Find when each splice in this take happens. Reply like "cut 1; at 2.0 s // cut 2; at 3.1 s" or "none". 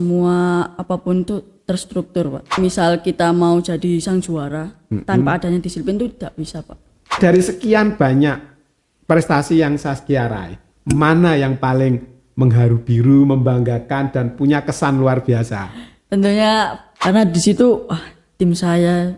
cut 1; at 2.6 s // cut 2; at 7.2 s // cut 3; at 16.8 s